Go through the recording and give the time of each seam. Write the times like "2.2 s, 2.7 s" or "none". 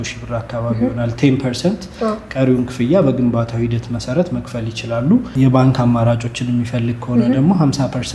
5.3 s